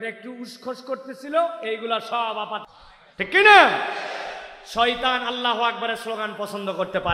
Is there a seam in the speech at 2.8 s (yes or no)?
yes